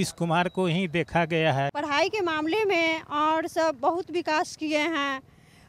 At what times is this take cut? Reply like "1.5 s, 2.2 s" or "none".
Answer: 1.7 s